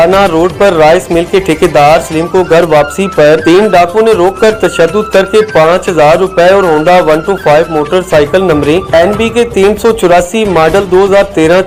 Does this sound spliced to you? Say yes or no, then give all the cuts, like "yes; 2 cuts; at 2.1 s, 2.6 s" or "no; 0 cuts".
no; 0 cuts